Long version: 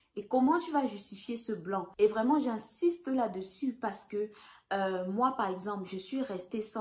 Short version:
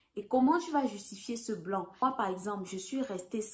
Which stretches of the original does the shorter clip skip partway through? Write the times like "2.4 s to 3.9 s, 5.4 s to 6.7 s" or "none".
2.0 s to 5.2 s